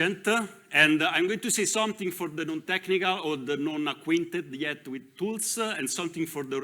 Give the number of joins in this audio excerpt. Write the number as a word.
zero